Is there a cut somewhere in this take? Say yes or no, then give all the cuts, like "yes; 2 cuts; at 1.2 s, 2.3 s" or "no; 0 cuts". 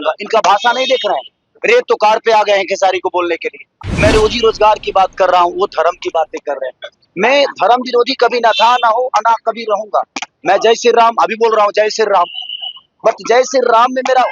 yes; 1 cut; at 3.8 s